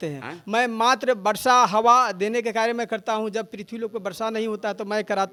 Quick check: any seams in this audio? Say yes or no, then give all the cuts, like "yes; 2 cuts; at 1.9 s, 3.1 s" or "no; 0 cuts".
no; 0 cuts